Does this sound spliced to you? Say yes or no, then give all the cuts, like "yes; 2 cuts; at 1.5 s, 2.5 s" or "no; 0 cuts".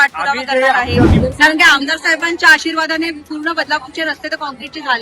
yes; 1 cut; at 1.1 s